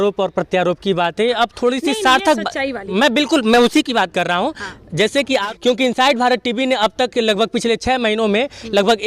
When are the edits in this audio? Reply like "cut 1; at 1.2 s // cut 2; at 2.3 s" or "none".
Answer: cut 1; at 5.4 s

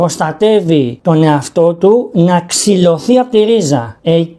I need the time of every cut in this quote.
none

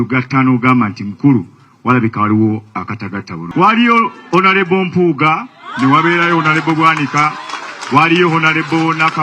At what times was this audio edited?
cut 1; at 3.4 s

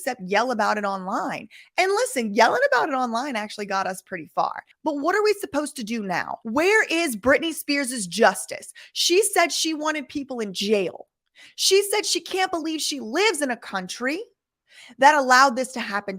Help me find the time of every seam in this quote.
cut 1; at 4.7 s // cut 2; at 6.3 s

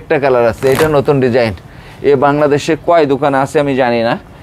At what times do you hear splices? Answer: none

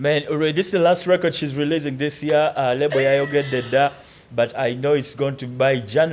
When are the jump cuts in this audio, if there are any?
none

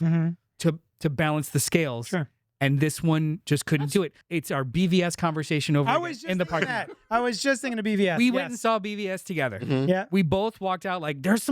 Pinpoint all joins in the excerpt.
cut 1; at 4.2 s

